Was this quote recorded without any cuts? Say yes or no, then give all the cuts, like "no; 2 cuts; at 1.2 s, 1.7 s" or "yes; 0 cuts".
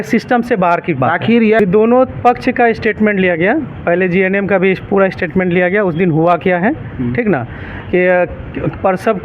no; 1 cut; at 1.6 s